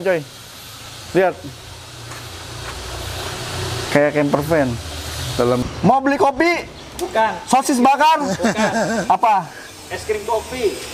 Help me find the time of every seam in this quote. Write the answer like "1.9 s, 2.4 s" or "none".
5.6 s

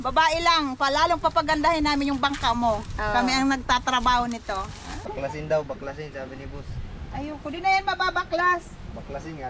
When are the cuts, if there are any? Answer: 5.1 s

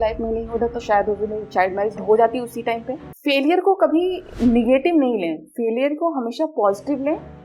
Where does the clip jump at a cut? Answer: 3.1 s

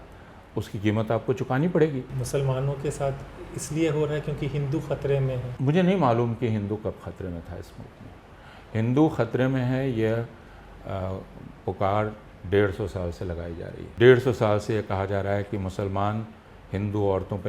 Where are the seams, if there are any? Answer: 2.1 s, 5.5 s, 13.9 s

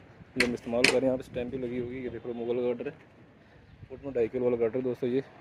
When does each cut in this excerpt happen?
none

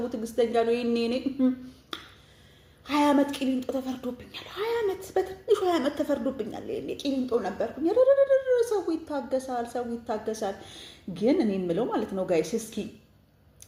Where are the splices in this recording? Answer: none

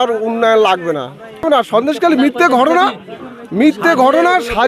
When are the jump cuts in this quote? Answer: 1.5 s

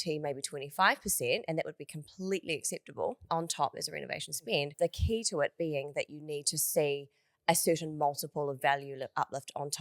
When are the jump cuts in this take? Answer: 4.7 s

